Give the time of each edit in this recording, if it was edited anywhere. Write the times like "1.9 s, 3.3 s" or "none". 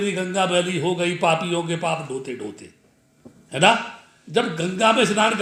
none